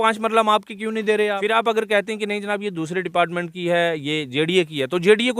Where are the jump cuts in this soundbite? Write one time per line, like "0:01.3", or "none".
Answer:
0:01.6